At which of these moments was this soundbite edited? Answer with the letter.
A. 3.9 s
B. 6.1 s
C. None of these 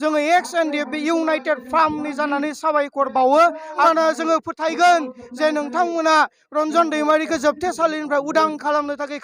A